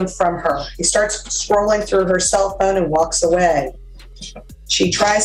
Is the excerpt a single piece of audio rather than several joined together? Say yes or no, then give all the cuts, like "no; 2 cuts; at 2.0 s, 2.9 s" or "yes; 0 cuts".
yes; 0 cuts